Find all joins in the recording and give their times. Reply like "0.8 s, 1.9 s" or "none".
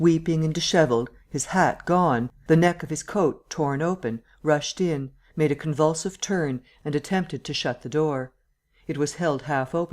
5.0 s